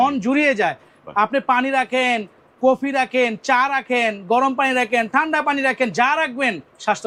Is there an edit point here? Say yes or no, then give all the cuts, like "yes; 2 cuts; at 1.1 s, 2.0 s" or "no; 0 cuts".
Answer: no; 0 cuts